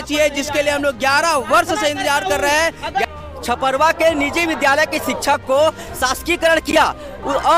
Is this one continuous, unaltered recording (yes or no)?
no